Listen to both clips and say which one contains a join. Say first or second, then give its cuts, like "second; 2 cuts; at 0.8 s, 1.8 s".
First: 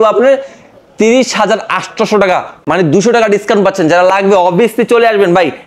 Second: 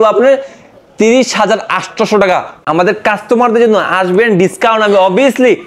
second; 1 cut; at 2.5 s